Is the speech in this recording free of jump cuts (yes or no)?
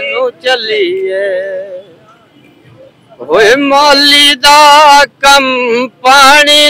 yes